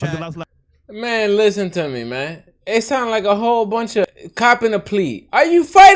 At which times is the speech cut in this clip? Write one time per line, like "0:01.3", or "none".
0:04.1